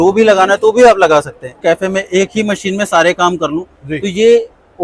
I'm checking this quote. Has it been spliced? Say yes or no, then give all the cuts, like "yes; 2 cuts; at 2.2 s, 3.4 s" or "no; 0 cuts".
yes; 1 cut; at 1.5 s